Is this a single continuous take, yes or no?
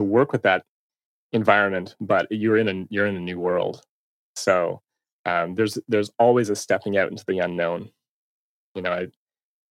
yes